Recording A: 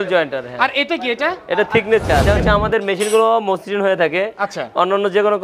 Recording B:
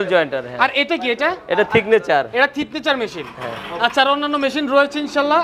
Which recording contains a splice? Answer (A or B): A